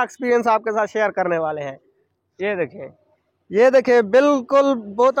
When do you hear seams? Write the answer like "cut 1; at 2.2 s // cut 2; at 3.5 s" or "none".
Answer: none